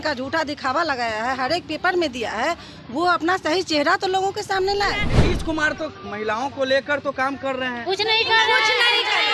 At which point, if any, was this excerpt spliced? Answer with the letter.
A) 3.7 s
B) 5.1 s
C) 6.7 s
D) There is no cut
B